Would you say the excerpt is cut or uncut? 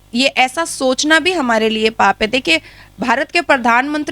uncut